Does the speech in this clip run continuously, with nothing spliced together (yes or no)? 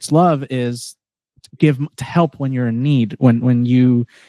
yes